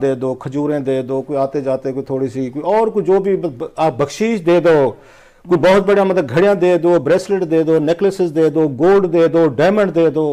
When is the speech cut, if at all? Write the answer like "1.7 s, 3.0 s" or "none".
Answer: none